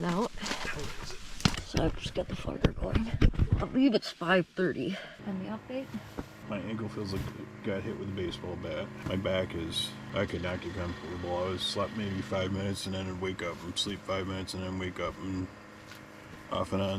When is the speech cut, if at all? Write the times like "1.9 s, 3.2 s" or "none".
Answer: 1.1 s, 3.3 s, 5.1 s, 6.4 s, 9.0 s, 10.0 s